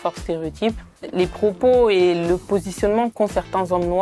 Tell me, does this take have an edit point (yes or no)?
yes